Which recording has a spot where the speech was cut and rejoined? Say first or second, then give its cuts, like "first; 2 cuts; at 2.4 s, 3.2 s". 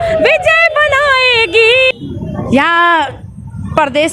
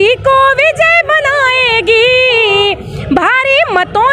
first; 1 cut; at 1.9 s